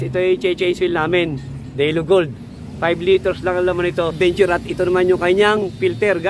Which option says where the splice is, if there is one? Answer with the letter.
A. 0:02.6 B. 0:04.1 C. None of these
B